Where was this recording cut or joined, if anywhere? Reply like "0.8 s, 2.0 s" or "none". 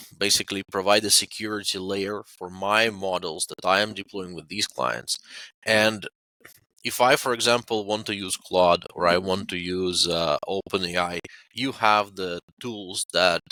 none